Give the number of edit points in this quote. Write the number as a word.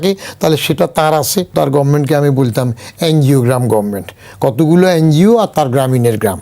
one